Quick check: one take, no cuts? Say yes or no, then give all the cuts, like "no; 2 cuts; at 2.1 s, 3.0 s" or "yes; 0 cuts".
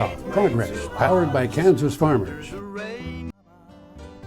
no; 2 cuts; at 2.4 s, 3.3 s